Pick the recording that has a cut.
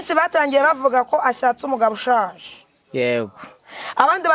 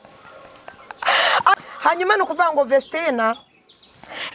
second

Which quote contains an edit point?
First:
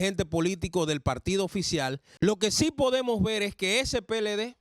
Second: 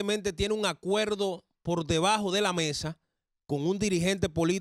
first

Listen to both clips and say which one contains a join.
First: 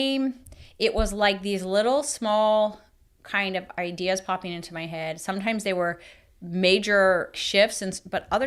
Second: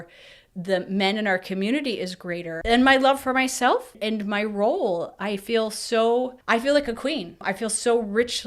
second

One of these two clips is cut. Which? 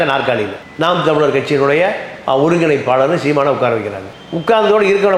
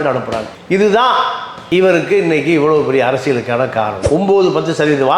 second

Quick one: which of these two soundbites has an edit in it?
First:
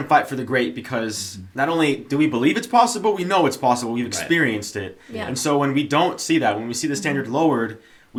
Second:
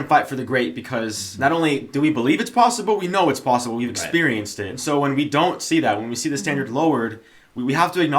second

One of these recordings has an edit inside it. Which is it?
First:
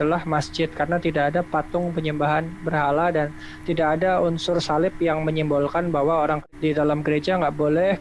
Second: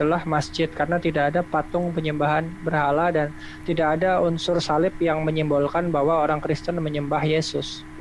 first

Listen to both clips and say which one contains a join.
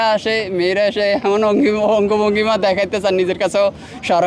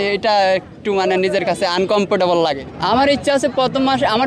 second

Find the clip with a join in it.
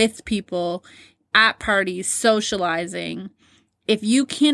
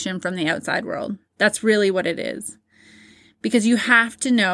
first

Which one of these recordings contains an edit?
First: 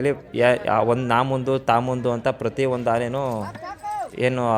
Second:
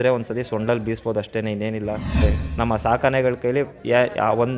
second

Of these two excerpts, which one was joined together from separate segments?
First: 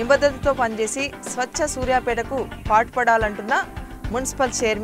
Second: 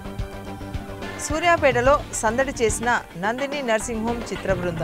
second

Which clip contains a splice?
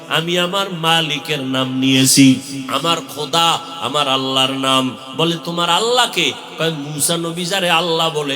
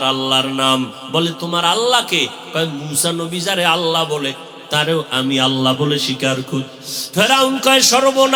first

